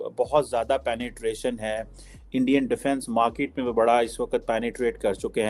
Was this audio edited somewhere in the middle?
no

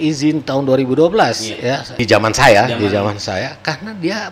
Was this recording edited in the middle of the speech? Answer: yes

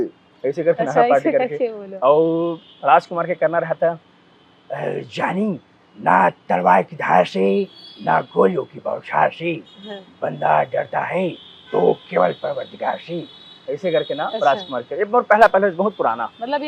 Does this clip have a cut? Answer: no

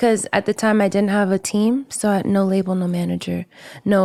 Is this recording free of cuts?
yes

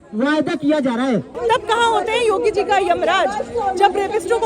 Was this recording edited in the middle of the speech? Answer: yes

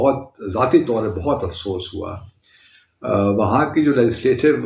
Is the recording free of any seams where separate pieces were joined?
yes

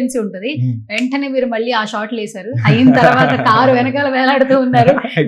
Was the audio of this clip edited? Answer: no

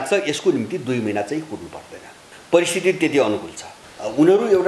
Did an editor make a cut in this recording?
yes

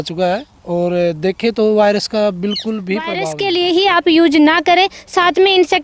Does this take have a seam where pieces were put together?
yes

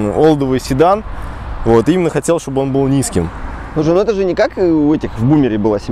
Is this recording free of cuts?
yes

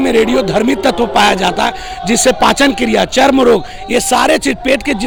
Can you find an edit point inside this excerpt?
no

